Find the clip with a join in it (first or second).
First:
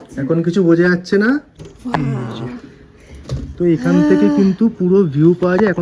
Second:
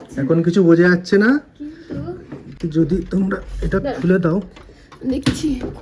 first